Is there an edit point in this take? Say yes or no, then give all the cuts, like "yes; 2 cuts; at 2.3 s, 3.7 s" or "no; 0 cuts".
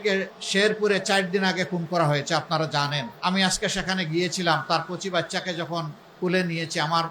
yes; 1 cut; at 3.1 s